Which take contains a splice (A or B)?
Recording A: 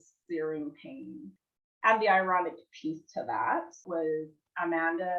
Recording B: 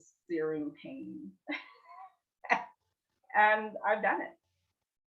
A